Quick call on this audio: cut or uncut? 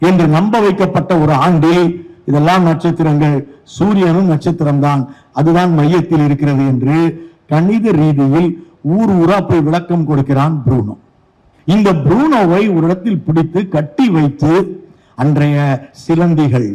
uncut